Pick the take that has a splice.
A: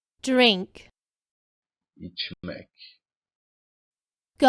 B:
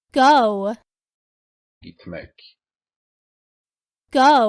A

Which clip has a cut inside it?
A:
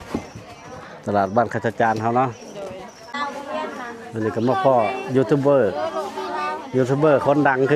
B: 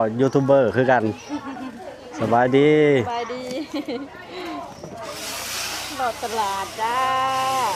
A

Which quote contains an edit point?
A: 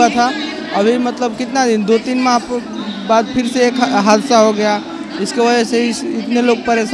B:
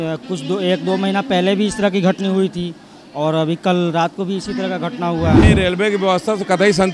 B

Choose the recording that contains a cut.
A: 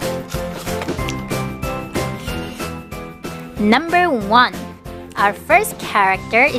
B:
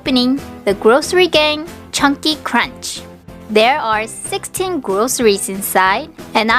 B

